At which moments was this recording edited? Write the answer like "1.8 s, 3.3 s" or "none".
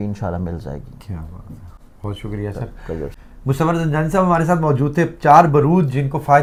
none